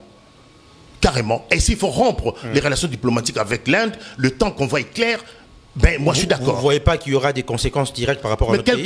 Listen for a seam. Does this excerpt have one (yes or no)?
no